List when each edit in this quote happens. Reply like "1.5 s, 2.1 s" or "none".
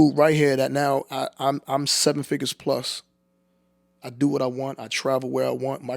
none